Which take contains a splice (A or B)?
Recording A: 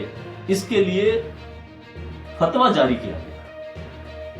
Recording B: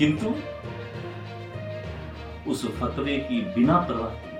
A